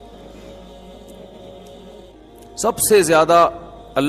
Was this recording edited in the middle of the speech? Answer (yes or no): yes